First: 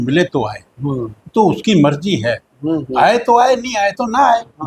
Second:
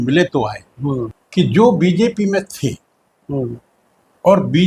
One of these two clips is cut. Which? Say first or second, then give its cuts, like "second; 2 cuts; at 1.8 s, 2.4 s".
second; 1 cut; at 1.2 s